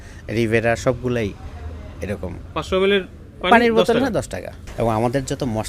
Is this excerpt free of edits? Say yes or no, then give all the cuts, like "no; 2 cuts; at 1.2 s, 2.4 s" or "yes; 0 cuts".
no; 1 cut; at 4.6 s